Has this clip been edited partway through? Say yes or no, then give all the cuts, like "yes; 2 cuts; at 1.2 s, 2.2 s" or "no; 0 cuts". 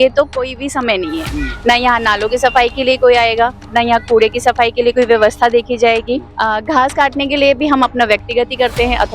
yes; 1 cut; at 6.3 s